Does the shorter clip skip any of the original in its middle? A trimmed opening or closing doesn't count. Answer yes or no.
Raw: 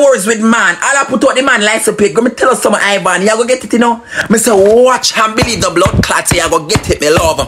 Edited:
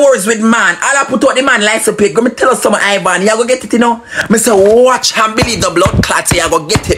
no